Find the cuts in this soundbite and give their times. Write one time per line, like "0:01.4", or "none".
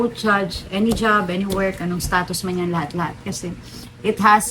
none